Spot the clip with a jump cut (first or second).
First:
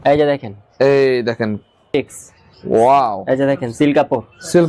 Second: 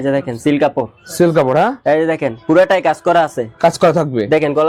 first